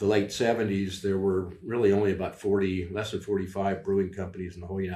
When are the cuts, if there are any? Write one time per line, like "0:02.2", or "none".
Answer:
none